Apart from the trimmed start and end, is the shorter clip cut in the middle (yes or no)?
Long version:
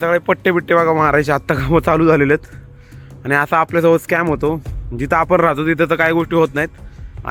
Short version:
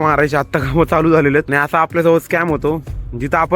yes